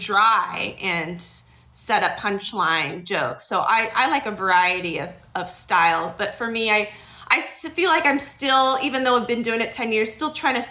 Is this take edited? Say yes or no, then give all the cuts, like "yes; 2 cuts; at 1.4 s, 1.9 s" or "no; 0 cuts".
no; 0 cuts